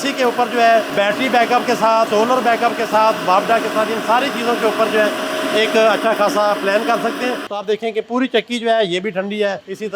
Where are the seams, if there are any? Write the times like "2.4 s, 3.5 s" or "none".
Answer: 0.9 s, 2.1 s, 7.5 s